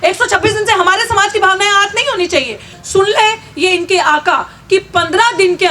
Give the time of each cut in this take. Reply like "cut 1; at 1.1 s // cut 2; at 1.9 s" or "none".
cut 1; at 2.7 s